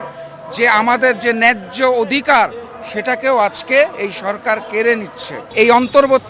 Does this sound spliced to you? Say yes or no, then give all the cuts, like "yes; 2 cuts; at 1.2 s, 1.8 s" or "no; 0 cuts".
yes; 1 cut; at 5.4 s